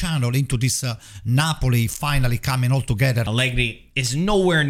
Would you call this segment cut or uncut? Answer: cut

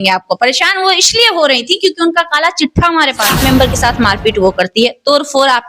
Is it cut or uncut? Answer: cut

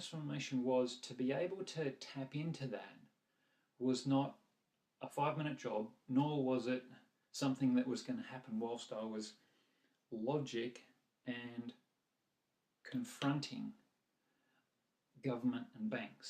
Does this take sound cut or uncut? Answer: cut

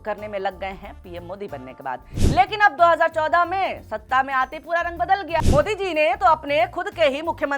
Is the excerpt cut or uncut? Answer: cut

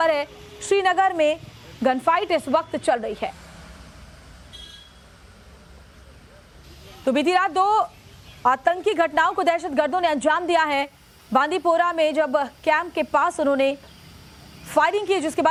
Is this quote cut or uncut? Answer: uncut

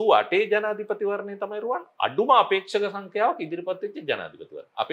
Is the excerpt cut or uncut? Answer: uncut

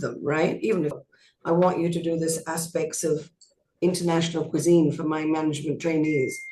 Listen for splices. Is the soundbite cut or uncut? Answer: cut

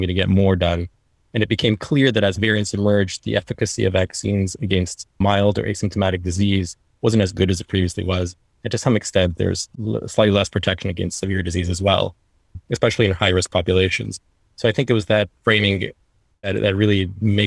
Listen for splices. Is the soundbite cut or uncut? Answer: cut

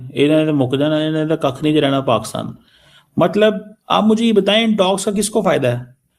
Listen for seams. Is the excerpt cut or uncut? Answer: uncut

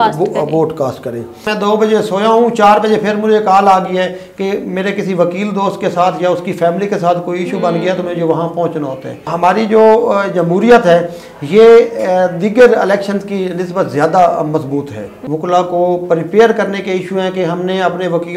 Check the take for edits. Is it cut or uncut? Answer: cut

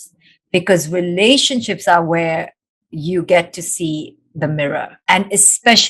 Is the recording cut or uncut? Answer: cut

